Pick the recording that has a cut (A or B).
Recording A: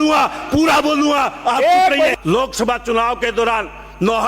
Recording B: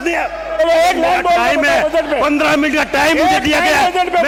A